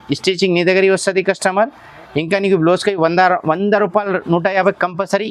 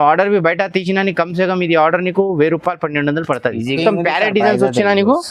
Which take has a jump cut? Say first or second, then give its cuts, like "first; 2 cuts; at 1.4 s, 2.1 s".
second; 1 cut; at 3.8 s